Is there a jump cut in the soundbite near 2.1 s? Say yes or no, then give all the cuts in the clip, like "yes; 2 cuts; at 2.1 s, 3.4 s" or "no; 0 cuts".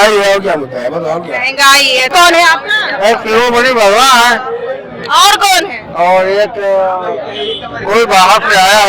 yes; 1 cut; at 2.1 s